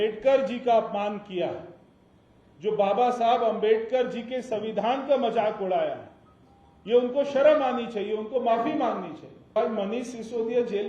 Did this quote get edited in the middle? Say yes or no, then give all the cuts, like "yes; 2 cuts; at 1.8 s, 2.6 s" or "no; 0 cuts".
yes; 1 cut; at 9.6 s